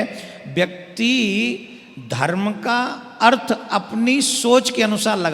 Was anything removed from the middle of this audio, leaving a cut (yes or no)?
no